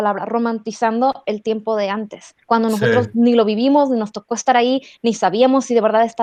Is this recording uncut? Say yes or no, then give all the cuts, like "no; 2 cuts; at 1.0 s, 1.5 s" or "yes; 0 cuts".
yes; 0 cuts